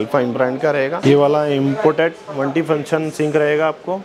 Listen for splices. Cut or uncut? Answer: cut